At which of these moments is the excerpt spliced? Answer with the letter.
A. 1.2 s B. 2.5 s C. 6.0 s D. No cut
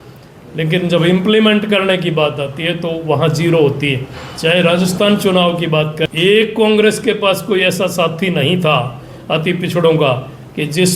C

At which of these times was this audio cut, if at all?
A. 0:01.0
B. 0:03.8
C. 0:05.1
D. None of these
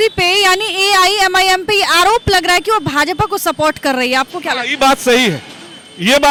D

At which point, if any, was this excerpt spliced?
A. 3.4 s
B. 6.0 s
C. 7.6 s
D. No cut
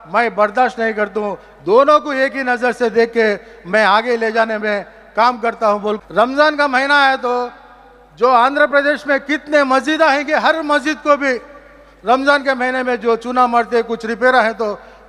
B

